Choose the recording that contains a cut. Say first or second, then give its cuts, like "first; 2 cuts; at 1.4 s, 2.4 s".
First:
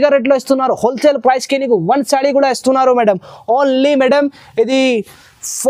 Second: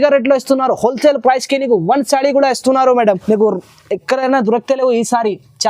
second; 1 cut; at 3.2 s